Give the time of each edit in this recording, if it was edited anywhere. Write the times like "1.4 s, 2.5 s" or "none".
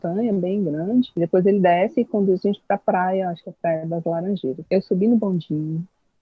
1.1 s, 4.6 s